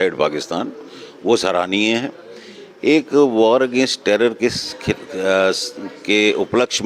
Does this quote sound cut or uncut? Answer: uncut